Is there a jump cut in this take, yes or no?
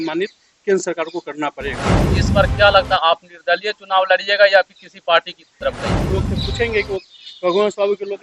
yes